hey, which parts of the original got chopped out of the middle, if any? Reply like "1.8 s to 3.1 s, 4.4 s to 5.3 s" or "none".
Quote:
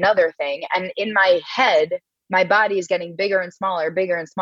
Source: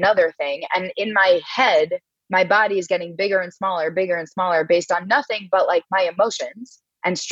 none